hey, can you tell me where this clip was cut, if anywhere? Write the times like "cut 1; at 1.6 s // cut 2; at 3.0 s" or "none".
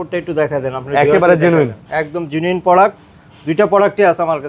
none